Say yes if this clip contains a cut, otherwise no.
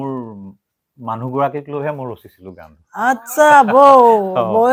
no